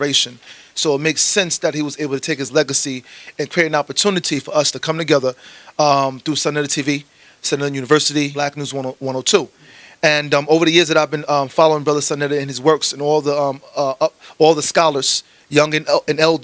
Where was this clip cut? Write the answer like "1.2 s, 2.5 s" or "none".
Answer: 8.4 s